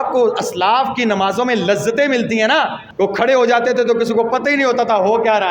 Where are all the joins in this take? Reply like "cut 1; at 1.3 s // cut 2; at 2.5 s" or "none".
none

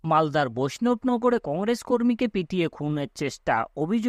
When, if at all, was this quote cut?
none

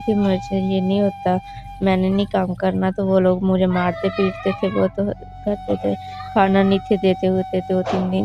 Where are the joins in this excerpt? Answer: none

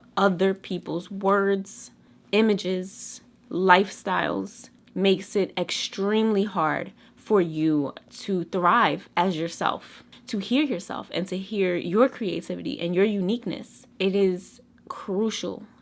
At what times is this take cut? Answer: cut 1; at 10.1 s // cut 2; at 13.8 s

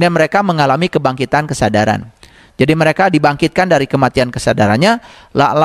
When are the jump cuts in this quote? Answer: none

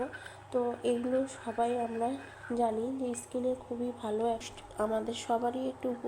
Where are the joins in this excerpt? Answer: cut 1; at 4.5 s

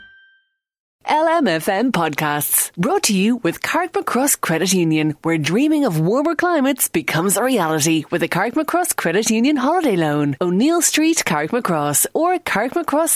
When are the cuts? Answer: cut 1; at 1.0 s

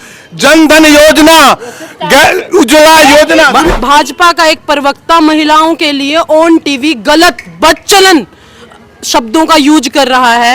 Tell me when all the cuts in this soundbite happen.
cut 1; at 3.7 s

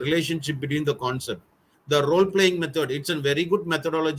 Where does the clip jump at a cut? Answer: cut 1; at 1.7 s

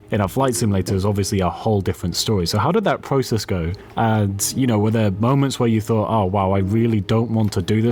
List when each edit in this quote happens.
none

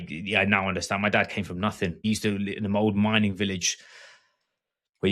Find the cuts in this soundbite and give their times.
cut 1; at 2.0 s

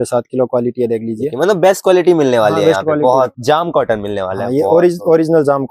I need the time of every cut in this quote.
cut 1; at 3.4 s

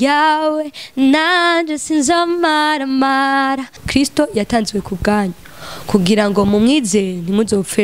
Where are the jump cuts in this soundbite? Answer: cut 1; at 3.8 s

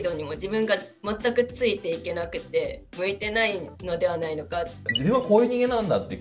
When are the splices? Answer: cut 1; at 2.9 s // cut 2; at 4.8 s

